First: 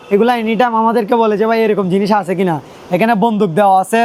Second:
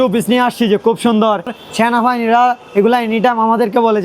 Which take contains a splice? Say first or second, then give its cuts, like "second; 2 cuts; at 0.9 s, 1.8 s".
second; 1 cut; at 1.6 s